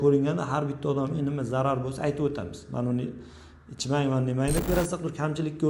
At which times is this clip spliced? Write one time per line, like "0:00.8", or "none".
0:04.7